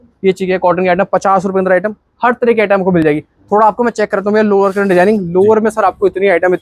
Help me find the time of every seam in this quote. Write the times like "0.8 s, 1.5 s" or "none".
none

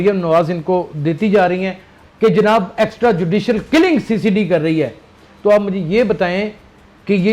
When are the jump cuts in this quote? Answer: 1.9 s

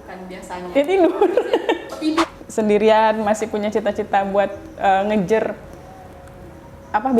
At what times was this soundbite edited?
2.2 s

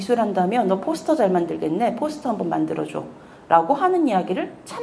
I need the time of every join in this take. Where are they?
none

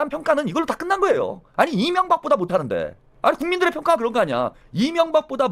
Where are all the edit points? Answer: 1.4 s, 4.6 s

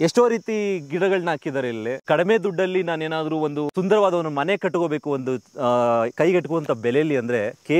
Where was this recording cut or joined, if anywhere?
2.0 s, 3.7 s

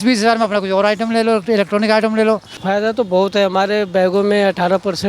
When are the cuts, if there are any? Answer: 2.5 s

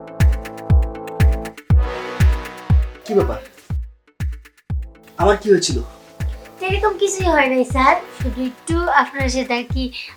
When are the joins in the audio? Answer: none

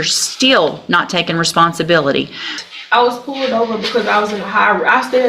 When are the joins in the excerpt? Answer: 2.6 s

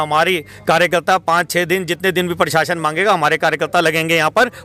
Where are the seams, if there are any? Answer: none

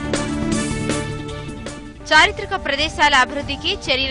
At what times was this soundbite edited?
1.2 s

